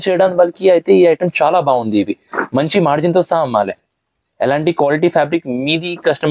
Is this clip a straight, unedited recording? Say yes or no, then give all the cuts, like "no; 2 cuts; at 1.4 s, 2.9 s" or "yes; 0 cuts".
yes; 0 cuts